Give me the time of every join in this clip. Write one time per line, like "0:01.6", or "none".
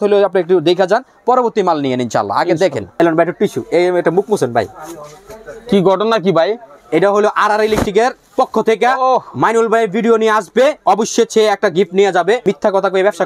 0:02.8
0:12.4